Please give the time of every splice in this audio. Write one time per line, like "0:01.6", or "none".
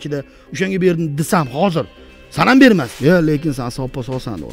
0:02.9